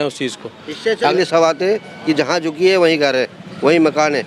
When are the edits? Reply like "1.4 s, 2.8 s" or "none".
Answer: 1.1 s